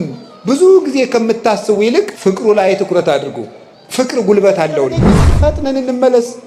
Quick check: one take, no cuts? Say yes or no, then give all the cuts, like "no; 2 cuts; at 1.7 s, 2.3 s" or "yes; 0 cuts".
no; 2 cuts; at 2.1 s, 5.3 s